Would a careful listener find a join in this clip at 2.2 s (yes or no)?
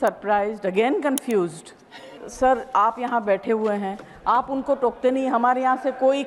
yes